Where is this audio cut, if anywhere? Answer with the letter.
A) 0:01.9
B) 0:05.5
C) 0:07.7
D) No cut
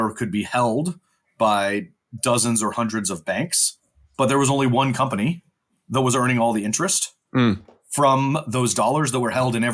D